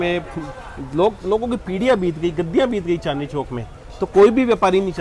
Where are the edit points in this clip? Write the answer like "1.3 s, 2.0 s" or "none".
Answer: none

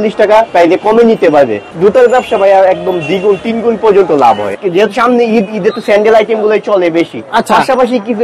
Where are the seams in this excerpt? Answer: 1.7 s, 4.6 s

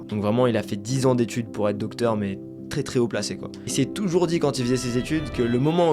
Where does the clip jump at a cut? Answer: 3.7 s

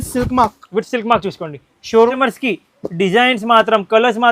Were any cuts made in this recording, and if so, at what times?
2.1 s

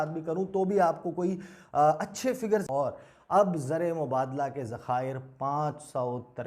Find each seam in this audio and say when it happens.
2.7 s

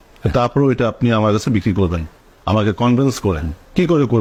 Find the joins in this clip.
none

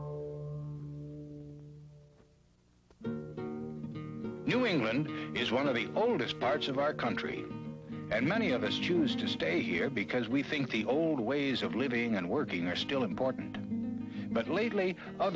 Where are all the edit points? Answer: none

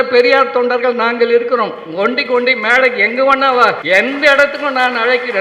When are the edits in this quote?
3.8 s

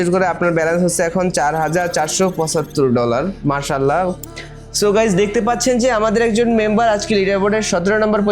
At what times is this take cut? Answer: 4.2 s

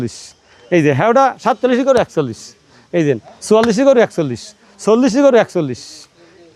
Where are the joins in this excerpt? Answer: none

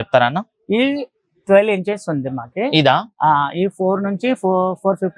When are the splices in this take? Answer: none

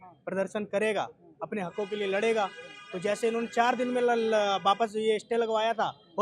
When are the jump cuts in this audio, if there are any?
none

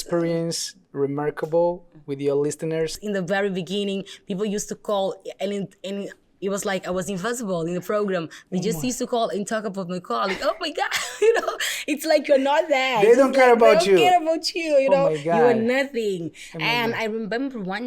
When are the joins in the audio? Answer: 3.0 s

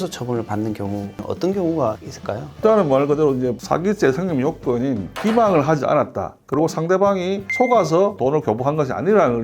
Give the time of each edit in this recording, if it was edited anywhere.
1.2 s

